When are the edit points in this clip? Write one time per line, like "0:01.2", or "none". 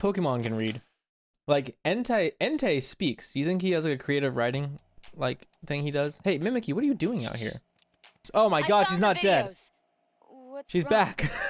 0:08.2